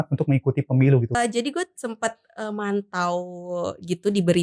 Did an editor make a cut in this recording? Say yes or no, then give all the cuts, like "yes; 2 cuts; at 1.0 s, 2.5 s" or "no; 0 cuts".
yes; 1 cut; at 1.1 s